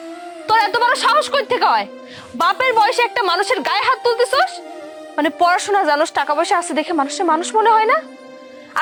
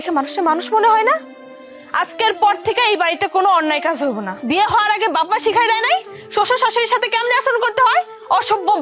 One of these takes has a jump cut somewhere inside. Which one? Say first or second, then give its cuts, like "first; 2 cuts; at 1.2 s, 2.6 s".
second; 1 cut; at 4.3 s